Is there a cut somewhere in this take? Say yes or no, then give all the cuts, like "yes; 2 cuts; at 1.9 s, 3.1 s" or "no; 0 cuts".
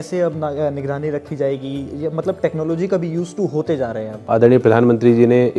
yes; 1 cut; at 4.2 s